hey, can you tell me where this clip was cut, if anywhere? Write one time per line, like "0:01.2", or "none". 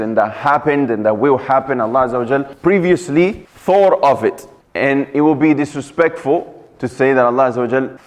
none